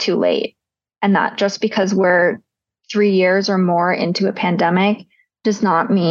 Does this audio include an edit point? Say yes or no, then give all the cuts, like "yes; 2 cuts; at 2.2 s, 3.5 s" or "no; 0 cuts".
no; 0 cuts